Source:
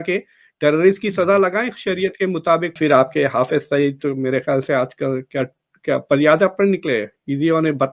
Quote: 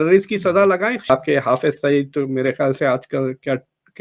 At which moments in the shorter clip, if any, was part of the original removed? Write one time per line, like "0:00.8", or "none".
0:01.1

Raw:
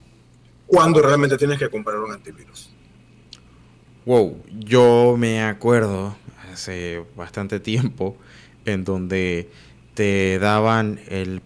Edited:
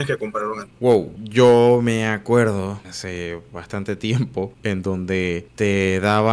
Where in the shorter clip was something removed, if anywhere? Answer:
0:01.1
0:02.9
0:04.5
0:05.5

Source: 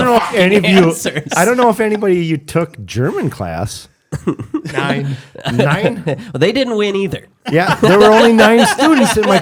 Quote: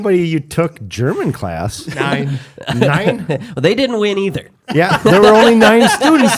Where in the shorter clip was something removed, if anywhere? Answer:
0:01.9

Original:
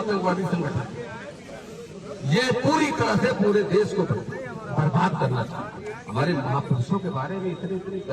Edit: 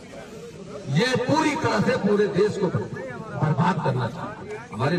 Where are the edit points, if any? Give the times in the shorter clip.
none

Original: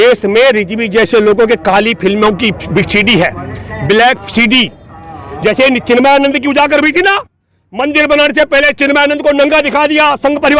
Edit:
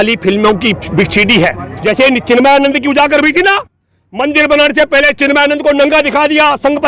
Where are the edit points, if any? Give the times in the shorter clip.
0:01.7

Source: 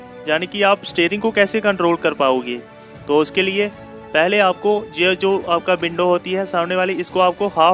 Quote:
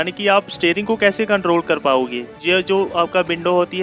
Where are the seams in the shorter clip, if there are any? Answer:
0:02.4

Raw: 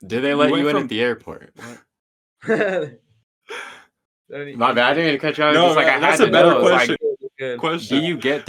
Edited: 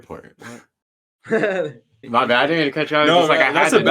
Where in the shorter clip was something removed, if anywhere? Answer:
0:02.0

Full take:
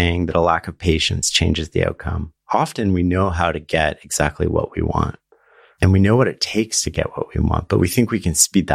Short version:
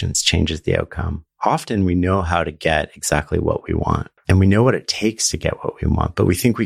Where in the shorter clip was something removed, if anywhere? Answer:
0:04.1

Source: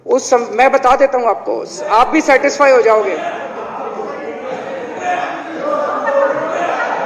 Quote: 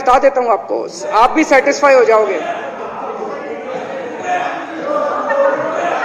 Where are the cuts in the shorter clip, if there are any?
none

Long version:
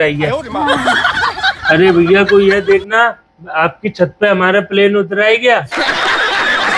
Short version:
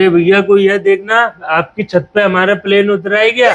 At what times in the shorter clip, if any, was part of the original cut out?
0:01.4

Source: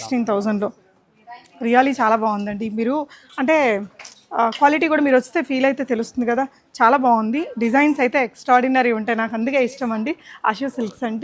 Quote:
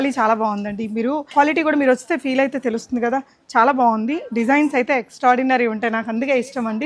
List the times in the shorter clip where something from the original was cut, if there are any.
0:01.3

